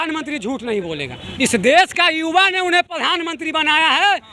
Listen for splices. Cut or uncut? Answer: cut